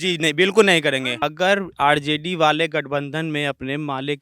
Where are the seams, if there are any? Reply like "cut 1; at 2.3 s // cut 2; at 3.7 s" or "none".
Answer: cut 1; at 1.2 s